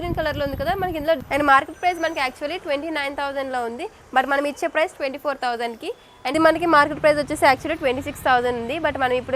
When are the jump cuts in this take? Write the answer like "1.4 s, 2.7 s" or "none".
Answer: 1.2 s, 6.3 s